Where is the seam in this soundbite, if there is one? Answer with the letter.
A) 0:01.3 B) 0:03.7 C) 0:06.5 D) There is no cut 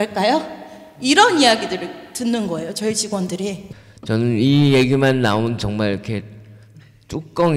B